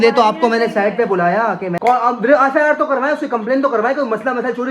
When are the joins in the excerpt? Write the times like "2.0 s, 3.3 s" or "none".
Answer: 1.7 s